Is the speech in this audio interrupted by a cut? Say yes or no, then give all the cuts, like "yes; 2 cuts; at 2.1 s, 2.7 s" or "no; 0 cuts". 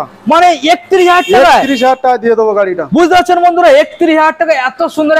no; 0 cuts